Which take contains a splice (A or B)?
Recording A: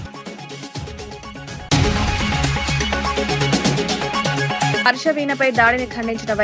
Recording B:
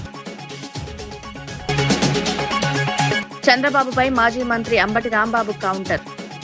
A